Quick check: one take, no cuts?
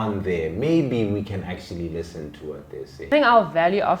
no; 1 cut; at 3.1 s

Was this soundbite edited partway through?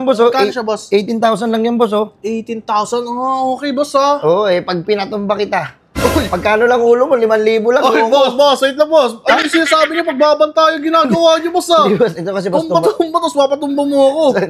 no; 0 cuts

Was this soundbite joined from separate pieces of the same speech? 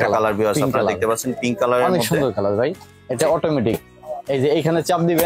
no; 0 cuts

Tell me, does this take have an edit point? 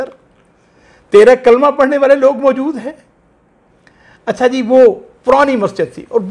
no; 0 cuts

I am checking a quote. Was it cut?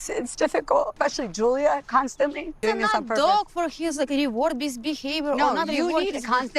yes; 2 cuts; at 0.9 s, 2.6 s

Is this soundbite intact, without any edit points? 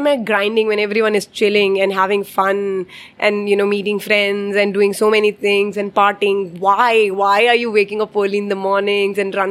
yes; 0 cuts

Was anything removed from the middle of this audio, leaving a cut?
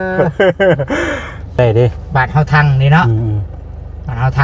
yes; 1 cut; at 1.6 s

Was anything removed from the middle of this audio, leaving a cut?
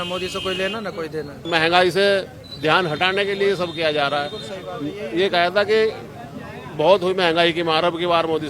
yes; 1 cut; at 1.4 s

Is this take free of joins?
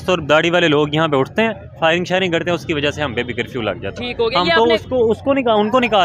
yes; 0 cuts

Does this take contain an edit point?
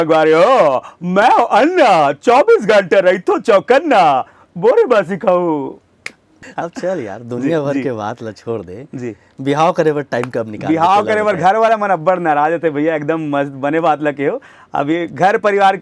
yes; 1 cut; at 6.4 s

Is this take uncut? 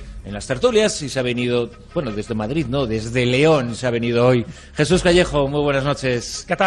yes; 0 cuts

